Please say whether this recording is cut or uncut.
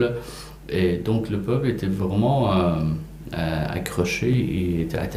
uncut